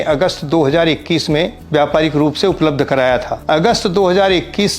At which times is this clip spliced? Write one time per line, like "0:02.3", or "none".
0:01.6
0:03.3

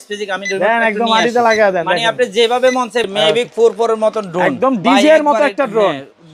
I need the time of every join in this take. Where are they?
0:03.0

